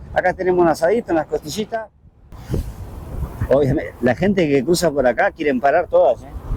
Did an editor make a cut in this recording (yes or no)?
yes